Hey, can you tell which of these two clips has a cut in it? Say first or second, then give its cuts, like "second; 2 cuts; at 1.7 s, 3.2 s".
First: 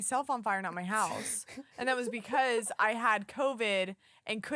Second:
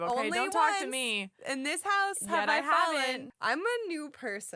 second; 1 cut; at 3.3 s